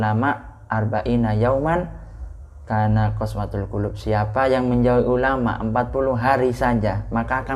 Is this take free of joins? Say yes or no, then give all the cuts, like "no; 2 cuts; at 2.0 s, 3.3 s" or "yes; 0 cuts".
yes; 0 cuts